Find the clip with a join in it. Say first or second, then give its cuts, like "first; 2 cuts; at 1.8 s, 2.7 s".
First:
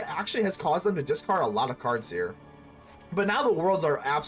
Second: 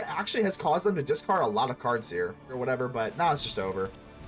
second; 1 cut; at 2.6 s